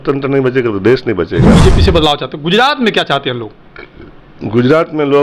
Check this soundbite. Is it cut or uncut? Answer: cut